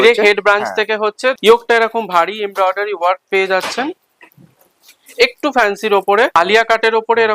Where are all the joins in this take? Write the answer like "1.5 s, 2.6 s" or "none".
1.4 s, 6.3 s